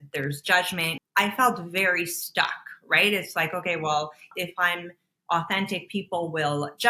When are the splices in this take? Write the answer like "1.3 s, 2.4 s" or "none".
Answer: 1.0 s